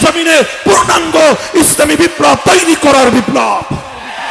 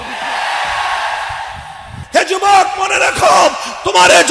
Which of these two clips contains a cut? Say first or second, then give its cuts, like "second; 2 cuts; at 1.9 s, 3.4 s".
second; 1 cut; at 1.9 s